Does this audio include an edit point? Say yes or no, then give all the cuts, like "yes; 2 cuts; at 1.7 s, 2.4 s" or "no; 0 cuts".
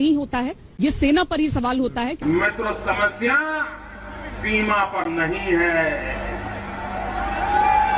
yes; 1 cut; at 2.1 s